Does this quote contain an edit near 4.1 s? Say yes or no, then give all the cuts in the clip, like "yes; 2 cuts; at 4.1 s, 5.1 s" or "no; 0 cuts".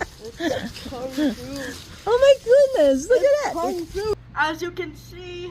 yes; 1 cut; at 4.1 s